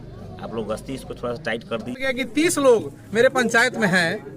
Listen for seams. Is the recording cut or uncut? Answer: cut